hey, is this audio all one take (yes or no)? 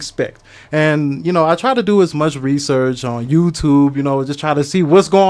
yes